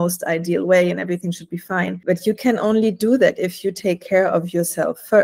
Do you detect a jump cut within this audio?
no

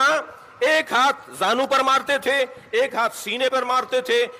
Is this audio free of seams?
yes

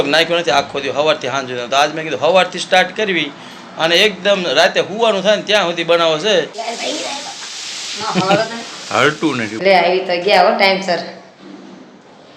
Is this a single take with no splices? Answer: no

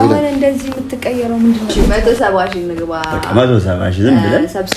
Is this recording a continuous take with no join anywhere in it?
no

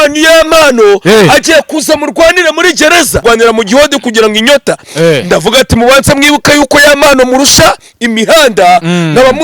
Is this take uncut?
no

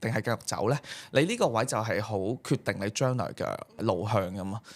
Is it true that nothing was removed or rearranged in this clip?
no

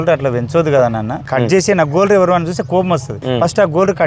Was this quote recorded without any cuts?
no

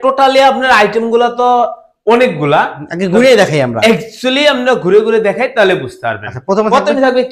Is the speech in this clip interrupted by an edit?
no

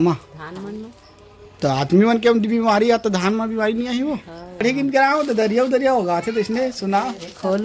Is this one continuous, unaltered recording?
no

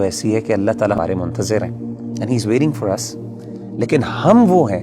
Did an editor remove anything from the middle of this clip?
yes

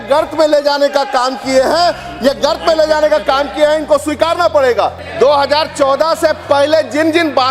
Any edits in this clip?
no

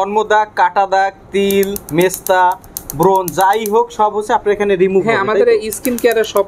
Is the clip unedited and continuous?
yes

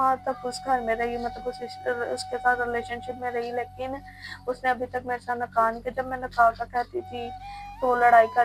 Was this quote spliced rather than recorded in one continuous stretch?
no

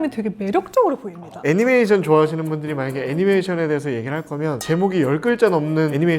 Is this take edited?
yes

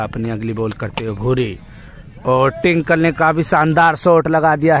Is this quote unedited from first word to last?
yes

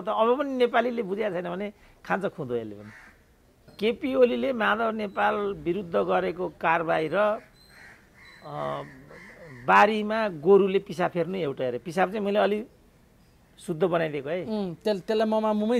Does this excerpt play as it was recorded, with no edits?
no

